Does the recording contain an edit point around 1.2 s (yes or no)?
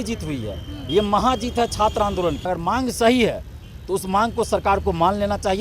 no